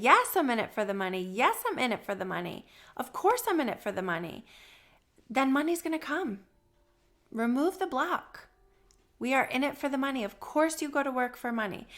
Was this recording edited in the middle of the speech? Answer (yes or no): no